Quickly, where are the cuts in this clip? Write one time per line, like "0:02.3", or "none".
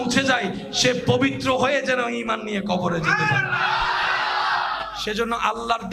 none